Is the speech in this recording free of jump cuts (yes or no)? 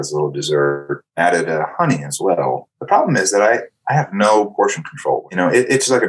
no